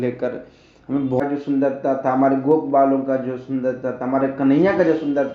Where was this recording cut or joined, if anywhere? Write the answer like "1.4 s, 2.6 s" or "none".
1.2 s

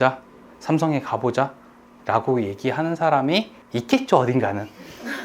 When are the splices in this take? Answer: 3.6 s

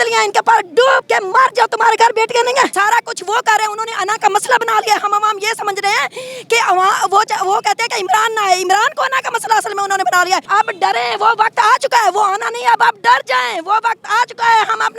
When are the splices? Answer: 1.0 s, 2.7 s, 10.5 s

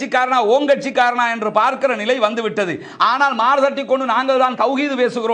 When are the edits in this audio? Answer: none

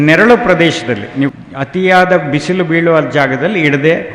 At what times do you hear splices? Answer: 1.3 s

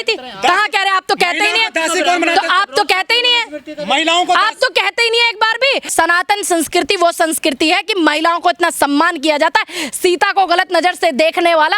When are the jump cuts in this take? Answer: 5.9 s

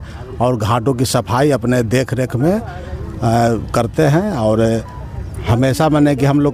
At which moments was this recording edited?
none

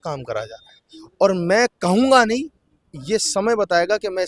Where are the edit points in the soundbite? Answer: none

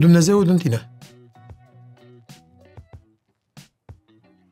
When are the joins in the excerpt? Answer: none

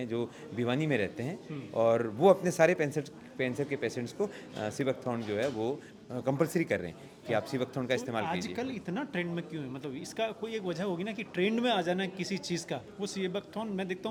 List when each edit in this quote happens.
none

